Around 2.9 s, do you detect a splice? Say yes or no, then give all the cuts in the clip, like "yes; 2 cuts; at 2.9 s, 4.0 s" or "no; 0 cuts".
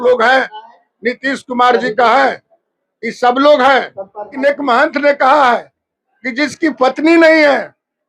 no; 1 cut; at 4.3 s